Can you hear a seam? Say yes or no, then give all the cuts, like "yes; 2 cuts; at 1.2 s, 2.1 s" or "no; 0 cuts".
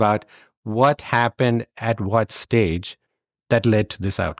no; 0 cuts